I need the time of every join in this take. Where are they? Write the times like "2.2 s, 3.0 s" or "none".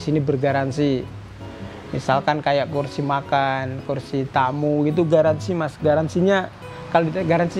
none